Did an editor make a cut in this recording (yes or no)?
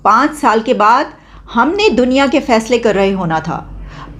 no